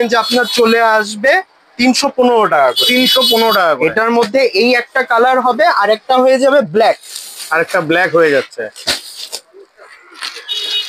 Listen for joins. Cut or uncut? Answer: uncut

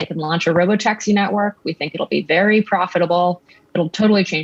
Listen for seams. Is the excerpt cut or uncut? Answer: uncut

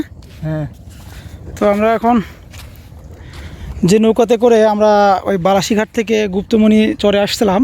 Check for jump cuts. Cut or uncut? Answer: cut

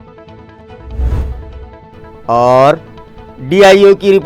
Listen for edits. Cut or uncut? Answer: uncut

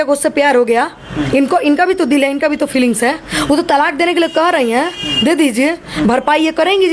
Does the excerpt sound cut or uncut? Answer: uncut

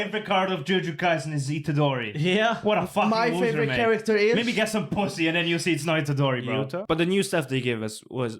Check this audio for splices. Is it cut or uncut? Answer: cut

